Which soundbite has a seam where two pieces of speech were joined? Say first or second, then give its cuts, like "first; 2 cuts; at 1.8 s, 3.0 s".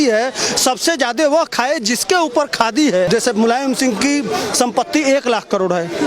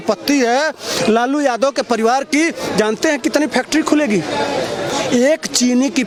first; 1 cut; at 3.1 s